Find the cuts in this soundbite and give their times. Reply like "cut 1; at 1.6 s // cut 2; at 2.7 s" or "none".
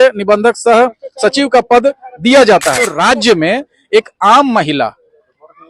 cut 1; at 2.9 s